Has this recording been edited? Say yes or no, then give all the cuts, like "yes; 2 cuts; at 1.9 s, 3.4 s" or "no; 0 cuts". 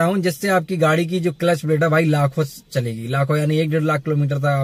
no; 0 cuts